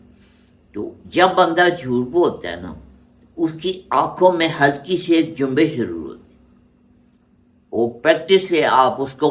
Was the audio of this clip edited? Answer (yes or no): no